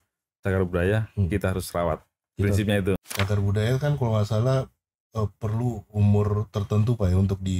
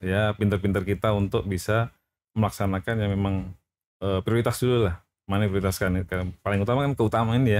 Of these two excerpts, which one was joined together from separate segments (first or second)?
first